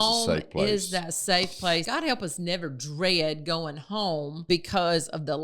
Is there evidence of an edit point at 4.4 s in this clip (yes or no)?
yes